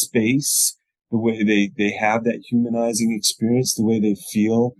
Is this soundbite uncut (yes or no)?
yes